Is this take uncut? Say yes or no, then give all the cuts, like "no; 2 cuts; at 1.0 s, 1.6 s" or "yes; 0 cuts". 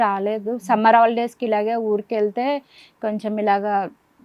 yes; 0 cuts